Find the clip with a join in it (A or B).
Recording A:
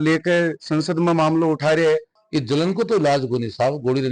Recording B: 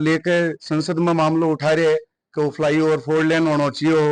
A